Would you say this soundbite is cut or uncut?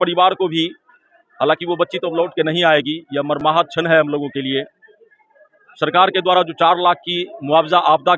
uncut